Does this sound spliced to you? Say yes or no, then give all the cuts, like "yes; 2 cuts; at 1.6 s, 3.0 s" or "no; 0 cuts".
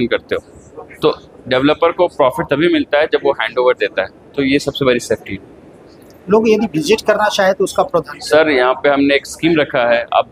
no; 0 cuts